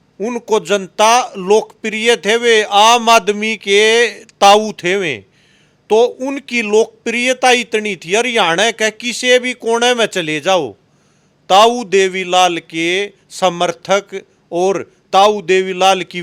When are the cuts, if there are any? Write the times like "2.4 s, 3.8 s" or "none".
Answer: none